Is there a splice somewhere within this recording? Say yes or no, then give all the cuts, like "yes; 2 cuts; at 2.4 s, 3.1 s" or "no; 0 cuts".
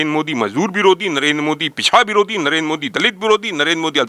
no; 0 cuts